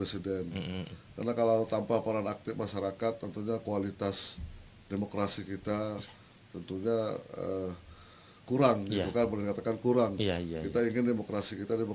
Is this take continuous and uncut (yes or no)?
yes